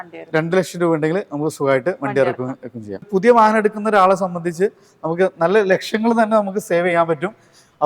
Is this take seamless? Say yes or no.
no